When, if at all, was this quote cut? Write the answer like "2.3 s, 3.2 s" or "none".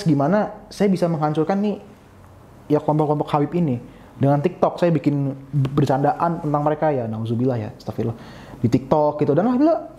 none